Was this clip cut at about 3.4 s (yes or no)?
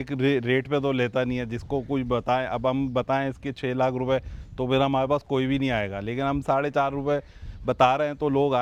no